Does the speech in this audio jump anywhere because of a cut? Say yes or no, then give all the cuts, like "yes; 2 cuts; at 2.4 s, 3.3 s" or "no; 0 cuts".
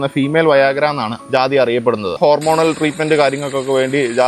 yes; 2 cuts; at 1.1 s, 2.2 s